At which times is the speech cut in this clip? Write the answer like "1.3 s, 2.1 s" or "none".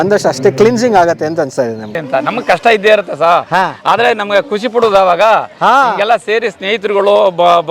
1.9 s